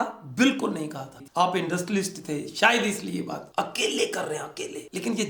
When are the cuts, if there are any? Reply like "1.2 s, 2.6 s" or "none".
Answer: 1.1 s, 3.5 s